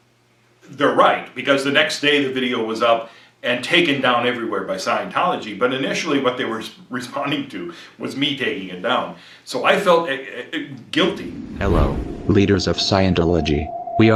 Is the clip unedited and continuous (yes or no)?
yes